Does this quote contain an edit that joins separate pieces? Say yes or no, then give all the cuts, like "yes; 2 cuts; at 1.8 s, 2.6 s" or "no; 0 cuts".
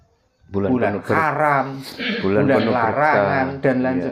no; 0 cuts